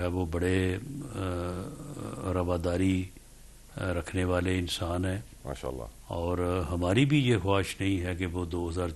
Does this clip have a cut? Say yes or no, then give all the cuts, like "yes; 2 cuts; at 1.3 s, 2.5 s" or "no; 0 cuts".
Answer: no; 0 cuts